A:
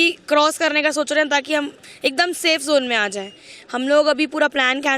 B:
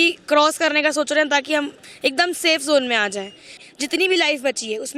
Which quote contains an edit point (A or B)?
B